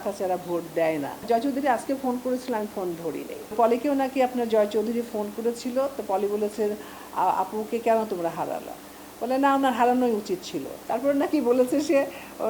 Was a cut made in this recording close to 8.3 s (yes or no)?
no